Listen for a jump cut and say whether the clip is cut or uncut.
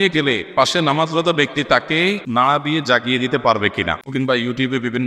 cut